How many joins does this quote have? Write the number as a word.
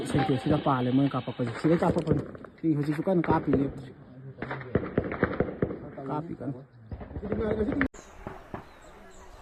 zero